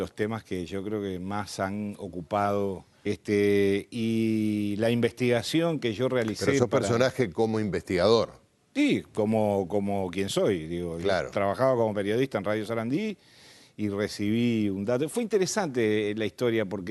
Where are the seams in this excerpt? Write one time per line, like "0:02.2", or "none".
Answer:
none